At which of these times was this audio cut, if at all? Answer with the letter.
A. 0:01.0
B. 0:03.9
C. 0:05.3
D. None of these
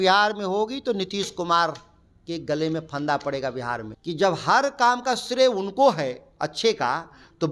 B